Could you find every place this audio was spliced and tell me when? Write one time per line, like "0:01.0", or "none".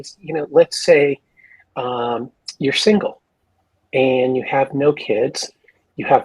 none